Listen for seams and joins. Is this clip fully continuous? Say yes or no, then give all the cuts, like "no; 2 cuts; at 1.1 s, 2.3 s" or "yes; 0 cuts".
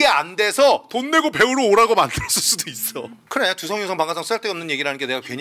no; 1 cut; at 3.2 s